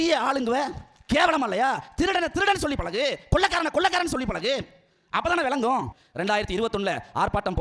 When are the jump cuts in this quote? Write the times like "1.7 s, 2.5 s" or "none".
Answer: 6.0 s

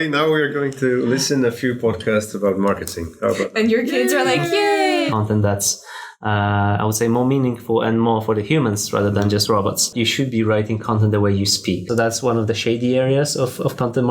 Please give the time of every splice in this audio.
5.1 s, 9.9 s, 11.8 s

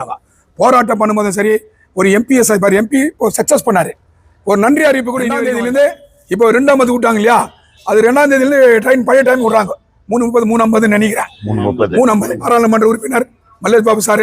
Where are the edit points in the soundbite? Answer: 5.4 s, 12.4 s

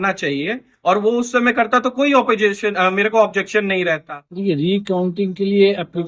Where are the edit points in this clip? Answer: 4.0 s

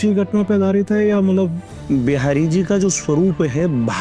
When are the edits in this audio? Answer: 1.8 s

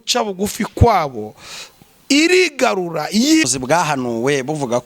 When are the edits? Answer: 3.5 s

